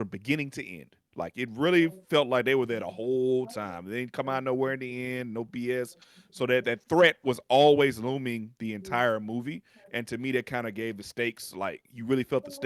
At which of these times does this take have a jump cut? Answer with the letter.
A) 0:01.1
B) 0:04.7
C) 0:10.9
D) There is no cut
D